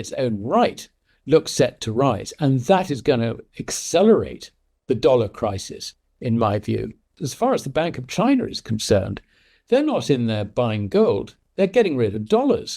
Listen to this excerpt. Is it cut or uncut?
cut